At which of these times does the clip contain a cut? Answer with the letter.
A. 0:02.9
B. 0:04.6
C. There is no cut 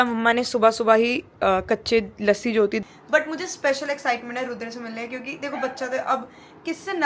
A